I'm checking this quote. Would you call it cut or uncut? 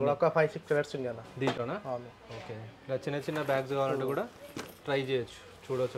uncut